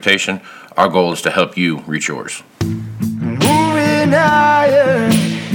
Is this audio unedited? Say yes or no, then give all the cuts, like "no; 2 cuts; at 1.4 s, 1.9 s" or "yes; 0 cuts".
no; 1 cut; at 2.4 s